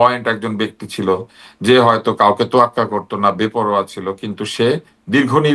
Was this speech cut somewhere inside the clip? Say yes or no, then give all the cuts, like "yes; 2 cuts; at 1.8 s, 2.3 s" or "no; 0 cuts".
no; 0 cuts